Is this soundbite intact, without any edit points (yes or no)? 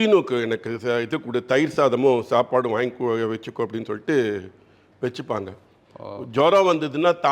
yes